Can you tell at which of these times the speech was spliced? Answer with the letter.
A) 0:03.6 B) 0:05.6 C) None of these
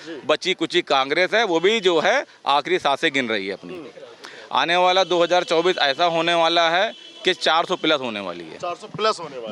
C